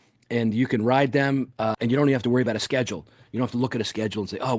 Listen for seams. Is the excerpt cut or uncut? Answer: cut